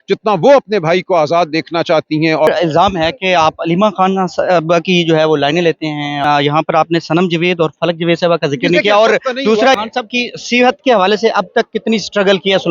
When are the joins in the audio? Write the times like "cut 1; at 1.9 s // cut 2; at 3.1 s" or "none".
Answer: cut 1; at 2.5 s // cut 2; at 6.2 s // cut 3; at 9.8 s